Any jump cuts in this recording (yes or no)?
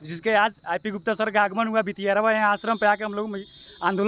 no